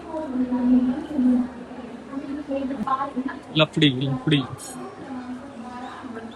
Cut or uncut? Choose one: cut